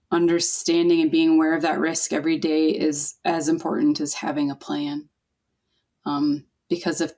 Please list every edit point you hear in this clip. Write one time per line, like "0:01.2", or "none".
none

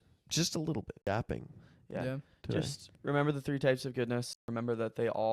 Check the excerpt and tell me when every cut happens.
0:01.1
0:04.4

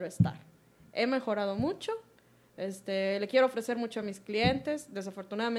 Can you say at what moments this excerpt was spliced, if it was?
none

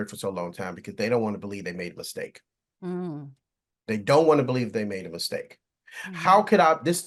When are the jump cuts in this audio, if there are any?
none

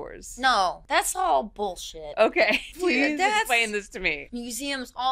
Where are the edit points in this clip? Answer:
0:00.8
0:02.7
0:04.2

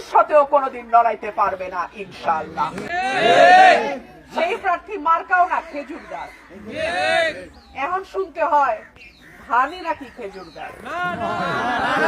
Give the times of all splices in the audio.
0:02.9

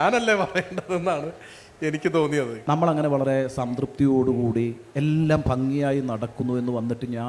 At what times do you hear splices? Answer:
0:02.6

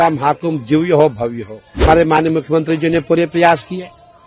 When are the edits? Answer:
0:01.8

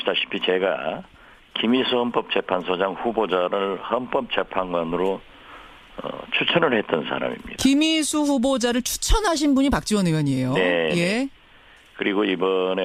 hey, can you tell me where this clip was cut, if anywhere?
none

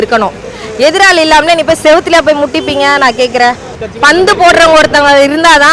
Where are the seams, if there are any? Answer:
0:03.8

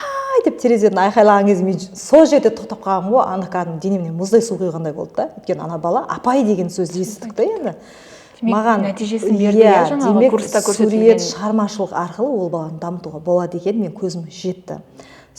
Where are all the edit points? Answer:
none

